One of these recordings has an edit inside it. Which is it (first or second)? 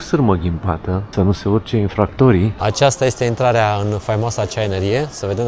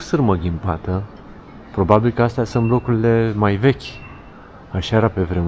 first